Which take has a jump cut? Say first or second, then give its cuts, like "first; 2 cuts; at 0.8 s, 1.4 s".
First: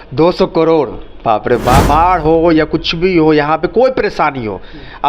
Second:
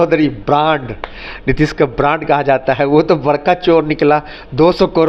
first; 1 cut; at 1.8 s